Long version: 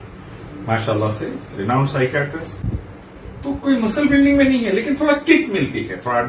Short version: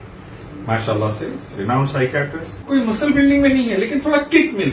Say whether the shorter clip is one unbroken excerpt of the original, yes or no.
no